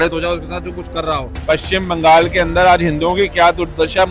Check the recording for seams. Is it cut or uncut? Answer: cut